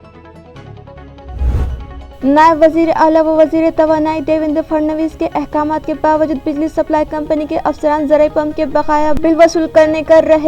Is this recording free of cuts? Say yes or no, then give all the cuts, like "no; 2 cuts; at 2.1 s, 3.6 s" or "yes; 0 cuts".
no; 1 cut; at 1.6 s